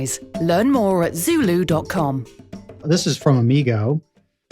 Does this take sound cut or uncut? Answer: cut